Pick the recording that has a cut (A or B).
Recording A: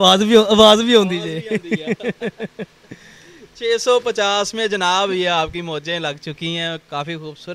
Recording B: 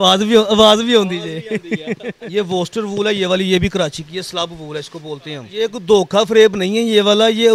B